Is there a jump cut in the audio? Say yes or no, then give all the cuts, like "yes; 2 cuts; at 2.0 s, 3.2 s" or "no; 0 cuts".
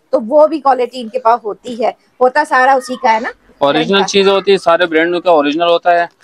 no; 0 cuts